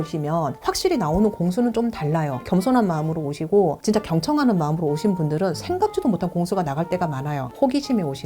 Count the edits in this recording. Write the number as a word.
two